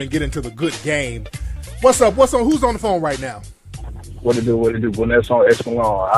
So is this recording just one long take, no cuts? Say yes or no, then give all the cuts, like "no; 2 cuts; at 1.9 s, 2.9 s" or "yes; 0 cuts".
yes; 0 cuts